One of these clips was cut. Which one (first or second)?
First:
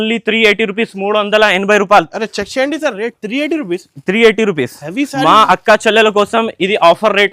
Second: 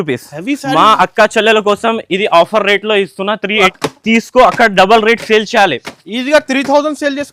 second